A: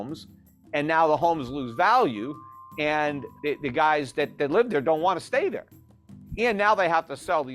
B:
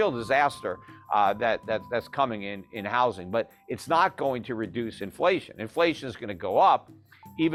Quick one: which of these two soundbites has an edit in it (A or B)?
A